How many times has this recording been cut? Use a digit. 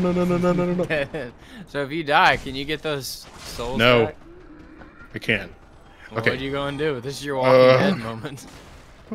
0